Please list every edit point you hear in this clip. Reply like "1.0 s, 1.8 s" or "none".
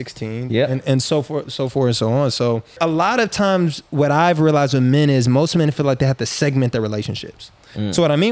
2.8 s